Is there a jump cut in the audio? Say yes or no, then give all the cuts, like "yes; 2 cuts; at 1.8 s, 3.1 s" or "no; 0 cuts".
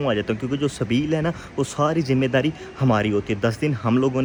no; 0 cuts